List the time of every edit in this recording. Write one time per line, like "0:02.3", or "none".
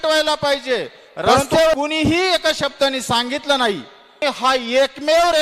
0:01.8
0:04.2